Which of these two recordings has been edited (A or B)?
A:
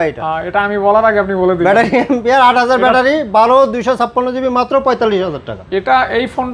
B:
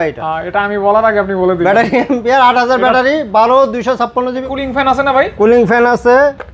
B